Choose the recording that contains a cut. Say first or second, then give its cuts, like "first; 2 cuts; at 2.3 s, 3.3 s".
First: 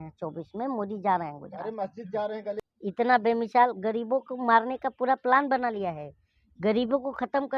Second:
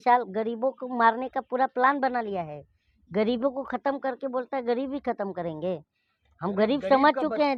first; 1 cut; at 2.6 s